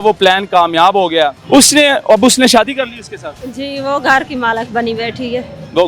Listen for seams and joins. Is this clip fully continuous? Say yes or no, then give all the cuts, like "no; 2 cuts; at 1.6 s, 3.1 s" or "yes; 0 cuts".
no; 1 cut; at 1.4 s